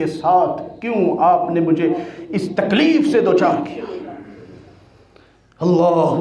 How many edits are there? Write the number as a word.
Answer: zero